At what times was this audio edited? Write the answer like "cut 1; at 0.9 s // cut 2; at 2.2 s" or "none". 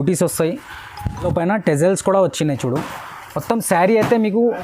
cut 1; at 1.2 s